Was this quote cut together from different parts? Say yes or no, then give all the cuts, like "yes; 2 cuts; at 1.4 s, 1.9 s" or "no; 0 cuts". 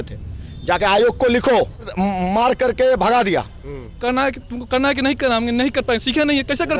yes; 2 cuts; at 1.9 s, 3.9 s